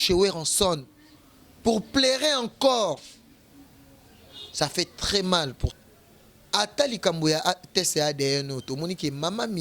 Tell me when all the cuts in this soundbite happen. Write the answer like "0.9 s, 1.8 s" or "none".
5.6 s